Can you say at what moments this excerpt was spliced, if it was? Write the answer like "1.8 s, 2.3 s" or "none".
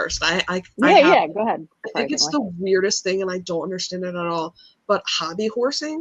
1.7 s